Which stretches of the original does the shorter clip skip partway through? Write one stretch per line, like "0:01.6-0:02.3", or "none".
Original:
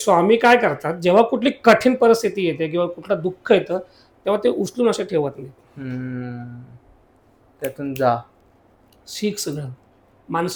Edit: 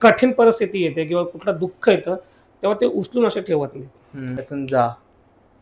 0:06.0-0:07.7